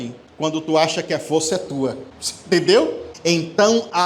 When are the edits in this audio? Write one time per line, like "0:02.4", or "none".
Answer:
0:03.1